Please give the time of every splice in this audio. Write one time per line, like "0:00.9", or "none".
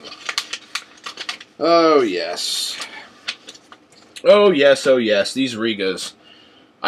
0:02.5